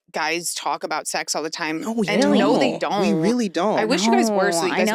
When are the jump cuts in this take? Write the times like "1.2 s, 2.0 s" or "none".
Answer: none